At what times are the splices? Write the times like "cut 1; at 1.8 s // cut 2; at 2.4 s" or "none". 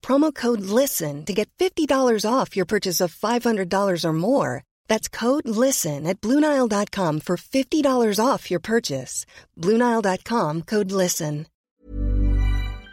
cut 1; at 11.5 s